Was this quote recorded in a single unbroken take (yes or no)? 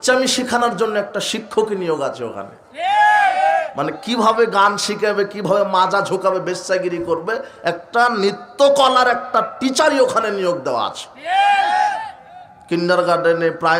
yes